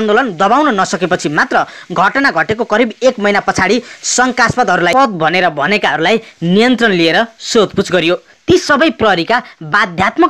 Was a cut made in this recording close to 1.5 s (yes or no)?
no